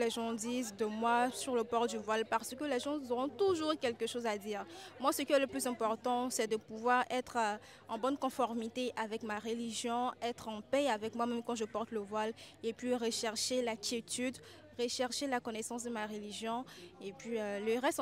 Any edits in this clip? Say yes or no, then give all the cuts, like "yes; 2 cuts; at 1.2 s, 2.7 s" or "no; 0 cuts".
no; 0 cuts